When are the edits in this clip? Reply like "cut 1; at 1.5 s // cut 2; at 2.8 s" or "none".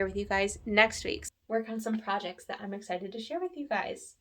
cut 1; at 1.3 s